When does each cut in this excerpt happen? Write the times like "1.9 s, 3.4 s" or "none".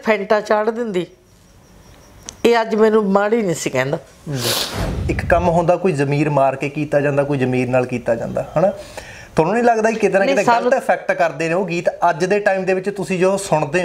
5.1 s